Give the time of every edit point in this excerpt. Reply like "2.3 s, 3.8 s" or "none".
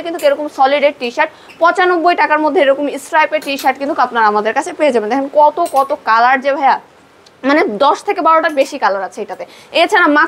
none